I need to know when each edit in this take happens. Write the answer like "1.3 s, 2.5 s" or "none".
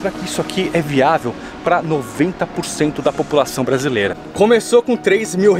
4.2 s